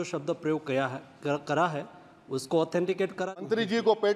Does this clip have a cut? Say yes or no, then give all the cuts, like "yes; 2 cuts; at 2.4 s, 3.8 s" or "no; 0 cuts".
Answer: yes; 1 cut; at 3.3 s